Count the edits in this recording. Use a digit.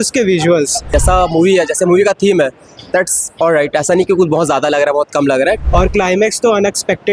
2